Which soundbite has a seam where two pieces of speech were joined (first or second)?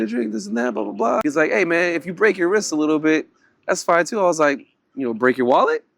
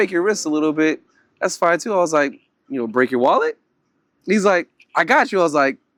first